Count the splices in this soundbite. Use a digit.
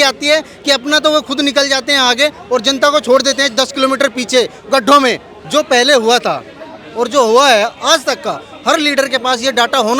1